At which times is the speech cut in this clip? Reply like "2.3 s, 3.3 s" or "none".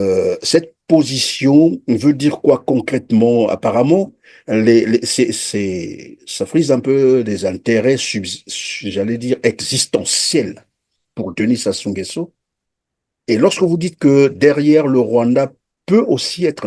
none